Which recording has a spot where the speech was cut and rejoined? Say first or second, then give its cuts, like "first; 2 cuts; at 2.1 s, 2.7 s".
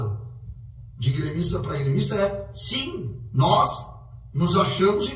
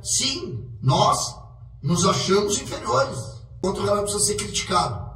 second; 1 cut; at 3.6 s